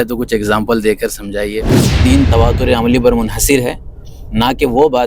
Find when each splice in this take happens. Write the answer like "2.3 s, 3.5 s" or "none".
1.7 s